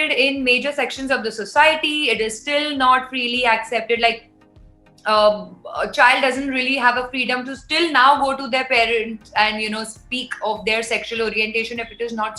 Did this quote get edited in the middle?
no; 0 cuts

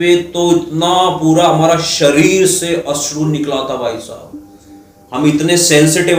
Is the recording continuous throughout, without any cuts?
yes; 0 cuts

